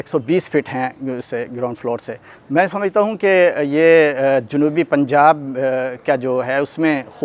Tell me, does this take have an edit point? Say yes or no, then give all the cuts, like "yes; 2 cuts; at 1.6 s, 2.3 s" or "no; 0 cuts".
no; 0 cuts